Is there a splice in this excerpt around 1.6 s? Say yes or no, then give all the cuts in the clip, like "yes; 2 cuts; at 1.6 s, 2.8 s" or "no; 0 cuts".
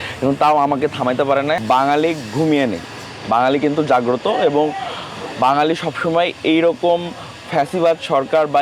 yes; 1 cut; at 1.6 s